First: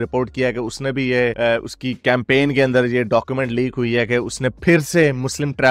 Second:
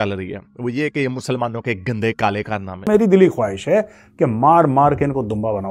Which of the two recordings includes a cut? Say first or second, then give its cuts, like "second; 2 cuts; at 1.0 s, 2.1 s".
second; 1 cut; at 2.9 s